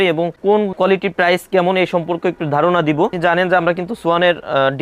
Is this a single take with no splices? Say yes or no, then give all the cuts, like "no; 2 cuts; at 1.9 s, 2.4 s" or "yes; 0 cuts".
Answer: no; 1 cut; at 3.1 s